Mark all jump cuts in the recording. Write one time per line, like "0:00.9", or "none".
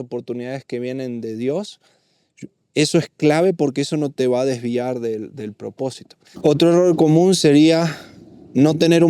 0:06.2

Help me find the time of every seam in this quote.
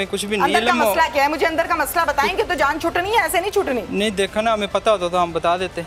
none

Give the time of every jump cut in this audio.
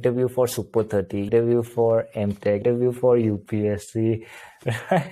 0:01.3
0:02.6

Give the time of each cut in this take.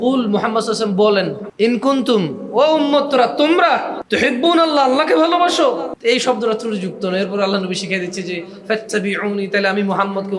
0:01.4
0:04.0
0:05.9

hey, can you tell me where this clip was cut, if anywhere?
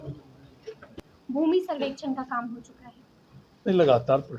0:01.1

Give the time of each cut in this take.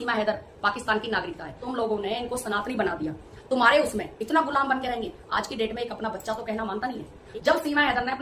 0:01.6
0:07.1

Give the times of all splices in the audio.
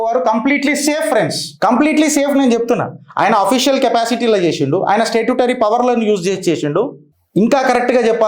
0:01.4

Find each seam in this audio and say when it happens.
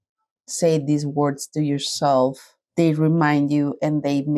none

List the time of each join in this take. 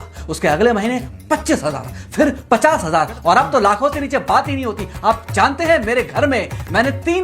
none

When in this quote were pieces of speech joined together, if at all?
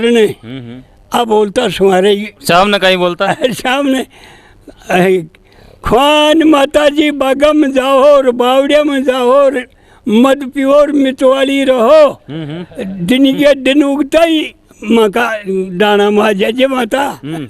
0:02.3

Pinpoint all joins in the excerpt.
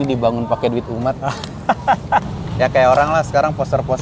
0:02.2

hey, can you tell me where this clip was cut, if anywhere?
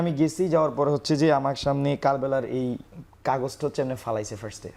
none

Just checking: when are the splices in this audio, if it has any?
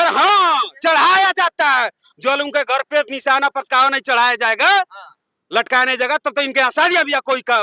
none

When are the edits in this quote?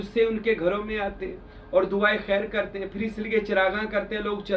none

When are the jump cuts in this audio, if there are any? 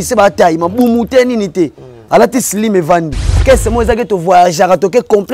0:03.4

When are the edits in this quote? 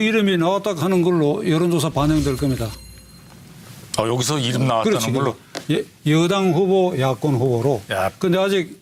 none

